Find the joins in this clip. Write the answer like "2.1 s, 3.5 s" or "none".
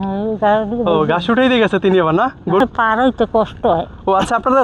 2.6 s